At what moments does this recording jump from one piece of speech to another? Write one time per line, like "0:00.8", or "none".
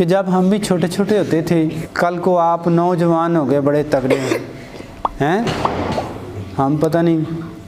0:01.8